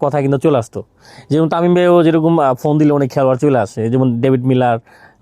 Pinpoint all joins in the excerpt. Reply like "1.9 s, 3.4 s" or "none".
none

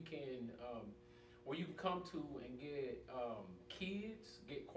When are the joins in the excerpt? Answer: 1.8 s

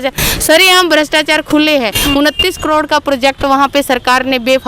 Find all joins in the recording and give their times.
1.9 s

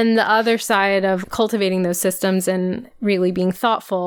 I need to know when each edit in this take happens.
1.2 s, 2.9 s

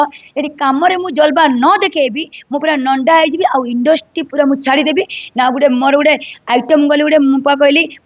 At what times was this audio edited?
none

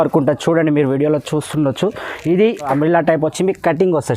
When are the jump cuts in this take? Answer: 2.7 s

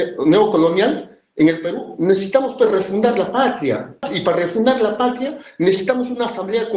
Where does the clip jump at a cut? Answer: 4.1 s

